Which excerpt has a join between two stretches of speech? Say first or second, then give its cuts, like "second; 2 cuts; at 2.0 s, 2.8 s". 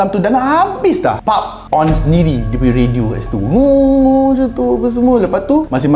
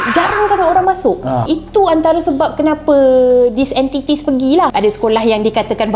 second; 2 cuts; at 1.4 s, 4.7 s